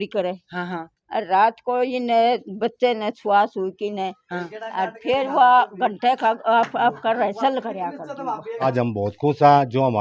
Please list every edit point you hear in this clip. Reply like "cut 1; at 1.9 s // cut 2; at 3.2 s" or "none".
cut 1; at 8.7 s